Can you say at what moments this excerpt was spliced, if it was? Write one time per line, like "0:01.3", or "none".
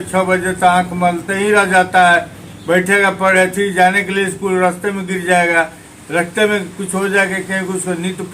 none